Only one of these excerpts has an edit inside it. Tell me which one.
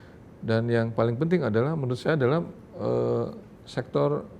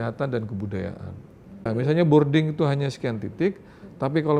second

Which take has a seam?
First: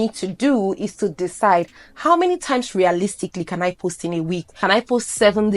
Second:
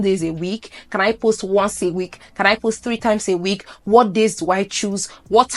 first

